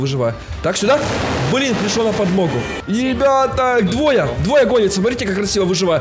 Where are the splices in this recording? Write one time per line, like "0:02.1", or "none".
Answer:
0:02.8